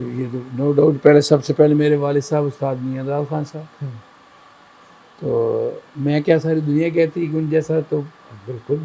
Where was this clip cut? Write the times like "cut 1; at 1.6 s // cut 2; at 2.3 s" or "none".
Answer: none